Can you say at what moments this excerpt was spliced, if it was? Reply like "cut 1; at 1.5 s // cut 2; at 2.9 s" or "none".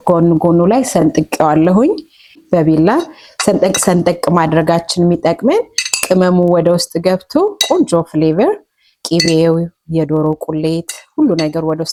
none